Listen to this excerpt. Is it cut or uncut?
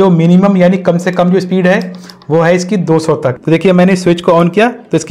cut